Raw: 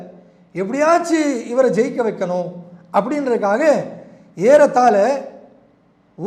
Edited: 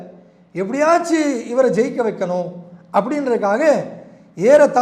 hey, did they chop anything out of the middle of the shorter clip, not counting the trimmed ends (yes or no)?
no